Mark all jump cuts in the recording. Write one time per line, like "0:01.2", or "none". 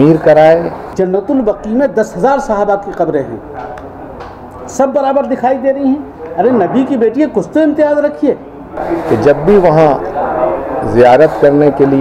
0:00.8
0:08.7